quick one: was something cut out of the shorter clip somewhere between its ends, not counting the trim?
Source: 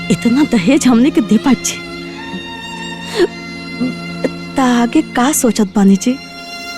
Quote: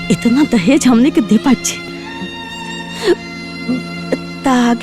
yes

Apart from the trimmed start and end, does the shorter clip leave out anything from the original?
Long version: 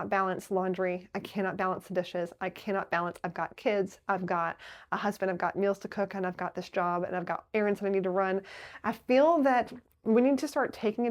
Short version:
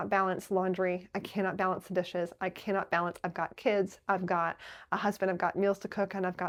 no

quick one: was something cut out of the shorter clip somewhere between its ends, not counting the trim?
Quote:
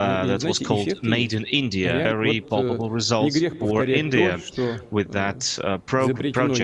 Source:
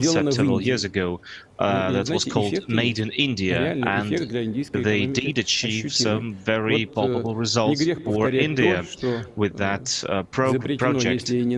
yes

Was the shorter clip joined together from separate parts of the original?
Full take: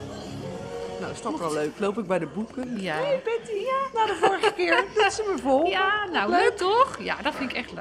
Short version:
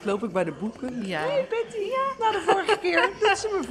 no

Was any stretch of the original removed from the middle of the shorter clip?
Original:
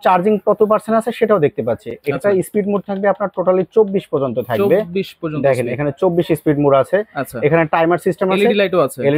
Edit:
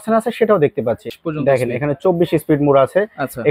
yes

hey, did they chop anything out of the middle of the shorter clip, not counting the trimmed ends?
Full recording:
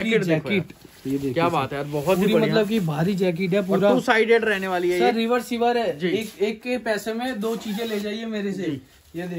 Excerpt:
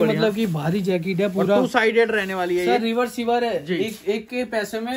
no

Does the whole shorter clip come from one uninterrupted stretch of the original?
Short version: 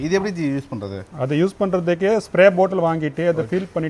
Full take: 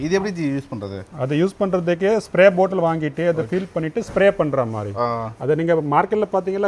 yes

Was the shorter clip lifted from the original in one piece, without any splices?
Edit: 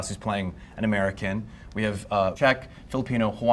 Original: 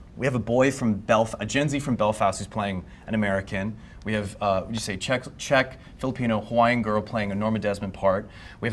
no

